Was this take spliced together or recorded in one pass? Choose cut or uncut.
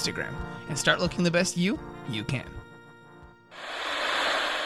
cut